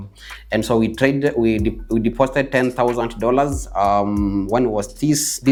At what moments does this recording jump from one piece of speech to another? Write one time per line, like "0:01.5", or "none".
none